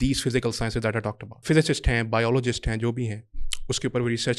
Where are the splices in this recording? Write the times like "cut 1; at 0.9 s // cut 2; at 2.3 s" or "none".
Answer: cut 1; at 1.4 s